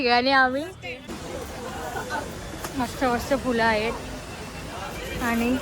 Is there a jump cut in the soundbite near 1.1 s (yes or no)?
yes